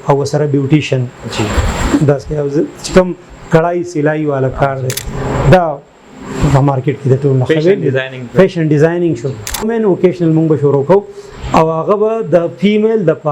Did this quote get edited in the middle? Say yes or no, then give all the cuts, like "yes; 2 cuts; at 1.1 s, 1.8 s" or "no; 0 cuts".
yes; 1 cut; at 9.7 s